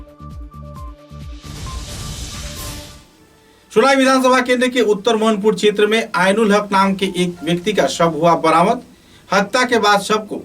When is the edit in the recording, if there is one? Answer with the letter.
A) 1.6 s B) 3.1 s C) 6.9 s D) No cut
B